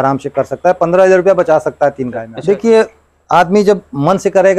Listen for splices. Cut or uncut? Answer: cut